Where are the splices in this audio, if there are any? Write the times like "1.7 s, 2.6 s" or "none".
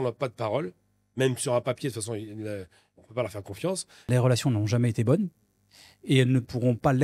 4.1 s